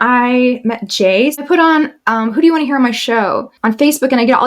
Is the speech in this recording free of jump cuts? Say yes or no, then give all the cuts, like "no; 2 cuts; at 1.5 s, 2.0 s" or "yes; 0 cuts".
no; 2 cuts; at 1.4 s, 3.5 s